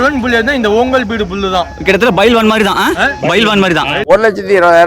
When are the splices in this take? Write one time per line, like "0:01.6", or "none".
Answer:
0:03.9